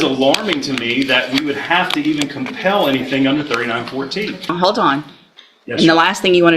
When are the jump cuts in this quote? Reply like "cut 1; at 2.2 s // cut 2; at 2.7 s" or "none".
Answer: cut 1; at 4.5 s